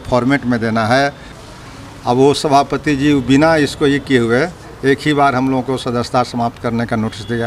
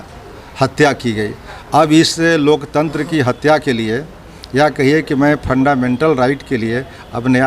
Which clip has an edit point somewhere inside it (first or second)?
first